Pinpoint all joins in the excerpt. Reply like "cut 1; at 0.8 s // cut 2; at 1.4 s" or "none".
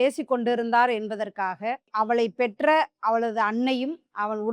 none